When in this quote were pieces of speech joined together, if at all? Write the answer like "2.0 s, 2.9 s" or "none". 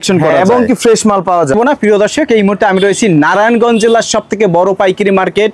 1.5 s

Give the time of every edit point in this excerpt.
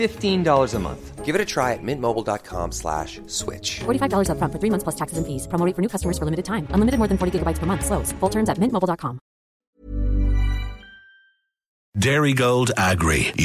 9.5 s, 11.9 s

